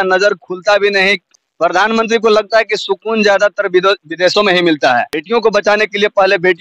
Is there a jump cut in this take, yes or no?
yes